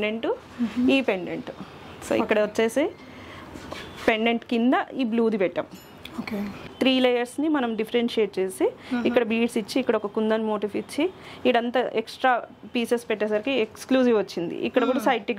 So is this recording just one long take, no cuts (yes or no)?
no